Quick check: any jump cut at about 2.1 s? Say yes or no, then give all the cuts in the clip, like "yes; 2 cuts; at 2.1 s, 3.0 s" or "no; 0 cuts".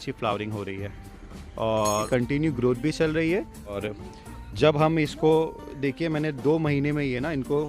yes; 2 cuts; at 2.1 s, 3.8 s